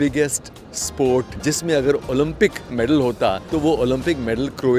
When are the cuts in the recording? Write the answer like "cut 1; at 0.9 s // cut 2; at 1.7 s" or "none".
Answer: cut 1; at 1.3 s // cut 2; at 3.4 s